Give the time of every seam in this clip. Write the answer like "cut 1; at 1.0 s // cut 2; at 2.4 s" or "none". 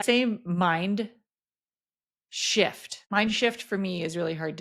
cut 1; at 2.9 s